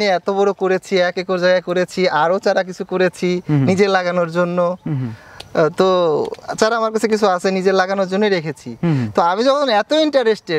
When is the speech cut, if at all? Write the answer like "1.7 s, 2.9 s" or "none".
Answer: none